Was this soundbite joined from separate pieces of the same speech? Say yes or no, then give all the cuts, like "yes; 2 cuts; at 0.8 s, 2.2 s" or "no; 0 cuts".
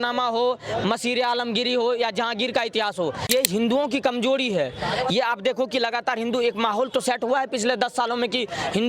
yes; 1 cut; at 3.3 s